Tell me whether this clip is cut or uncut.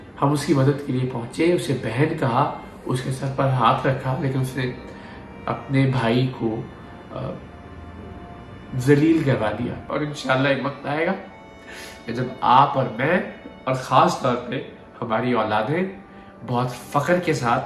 cut